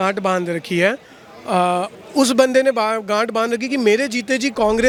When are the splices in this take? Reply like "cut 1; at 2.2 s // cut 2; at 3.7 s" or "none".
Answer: none